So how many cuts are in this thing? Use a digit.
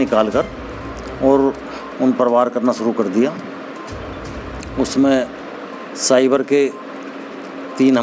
0